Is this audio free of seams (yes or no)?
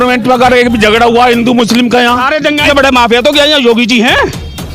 no